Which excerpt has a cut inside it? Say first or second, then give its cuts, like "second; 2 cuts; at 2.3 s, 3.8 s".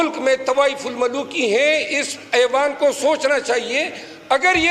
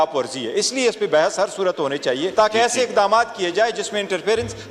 second; 1 cut; at 2.3 s